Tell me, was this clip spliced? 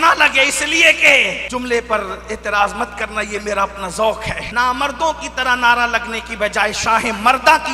yes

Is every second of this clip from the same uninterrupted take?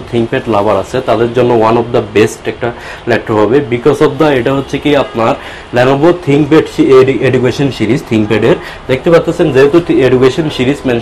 yes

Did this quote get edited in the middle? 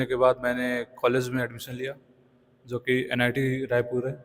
no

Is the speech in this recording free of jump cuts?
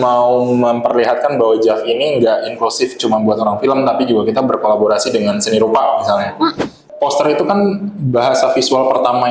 no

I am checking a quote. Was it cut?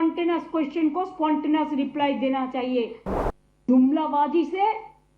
yes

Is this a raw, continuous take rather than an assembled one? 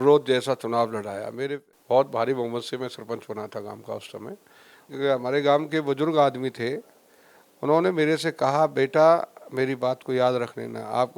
no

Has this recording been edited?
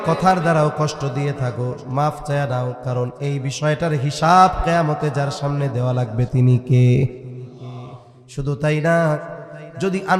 no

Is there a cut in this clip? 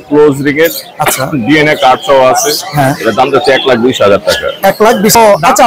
yes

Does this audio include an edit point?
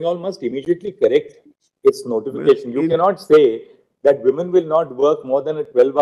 no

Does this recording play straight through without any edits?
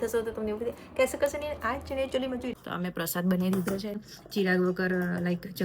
no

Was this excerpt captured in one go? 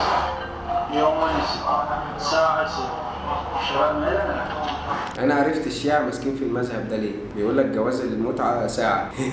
yes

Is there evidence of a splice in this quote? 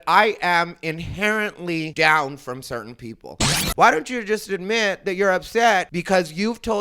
yes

